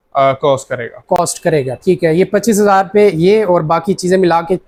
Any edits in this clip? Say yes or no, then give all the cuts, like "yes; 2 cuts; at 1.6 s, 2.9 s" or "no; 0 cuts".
no; 0 cuts